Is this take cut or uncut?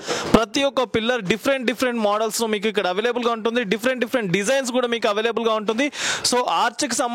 uncut